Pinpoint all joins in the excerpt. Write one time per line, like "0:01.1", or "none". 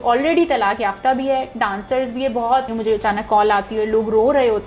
0:02.7